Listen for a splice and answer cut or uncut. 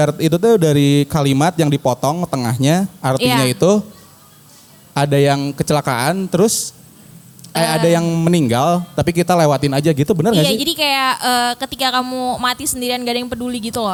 uncut